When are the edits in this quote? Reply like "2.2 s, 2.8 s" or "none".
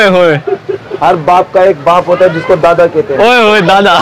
none